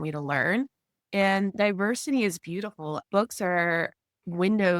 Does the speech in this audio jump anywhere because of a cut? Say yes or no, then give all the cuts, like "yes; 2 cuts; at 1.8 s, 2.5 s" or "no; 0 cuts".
yes; 1 cut; at 3.0 s